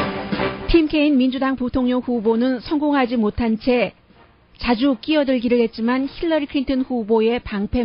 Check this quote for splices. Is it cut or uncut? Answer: uncut